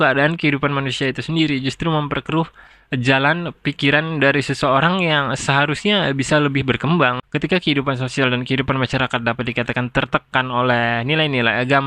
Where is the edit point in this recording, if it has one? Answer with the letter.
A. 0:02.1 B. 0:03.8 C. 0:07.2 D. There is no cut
C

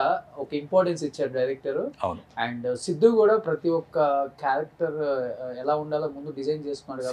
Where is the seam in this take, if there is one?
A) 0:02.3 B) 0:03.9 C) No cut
C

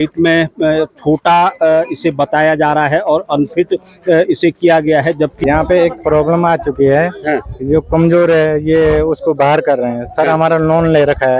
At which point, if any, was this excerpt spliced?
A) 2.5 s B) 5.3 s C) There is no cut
B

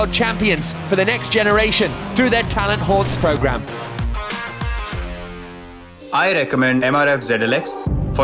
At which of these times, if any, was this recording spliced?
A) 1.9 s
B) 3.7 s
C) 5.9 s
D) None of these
C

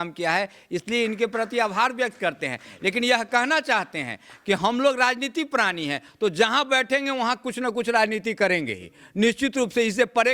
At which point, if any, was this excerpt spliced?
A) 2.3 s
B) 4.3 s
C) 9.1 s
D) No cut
D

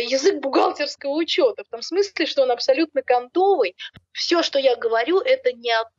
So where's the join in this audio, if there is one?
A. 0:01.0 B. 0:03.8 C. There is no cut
B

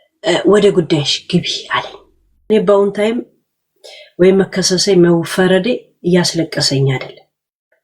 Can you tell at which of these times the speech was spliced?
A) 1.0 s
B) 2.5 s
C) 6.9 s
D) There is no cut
B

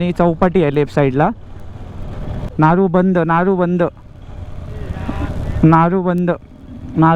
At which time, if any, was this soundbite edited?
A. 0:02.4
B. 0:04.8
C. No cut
A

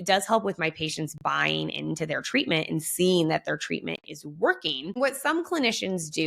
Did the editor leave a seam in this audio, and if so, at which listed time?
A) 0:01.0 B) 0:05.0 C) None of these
B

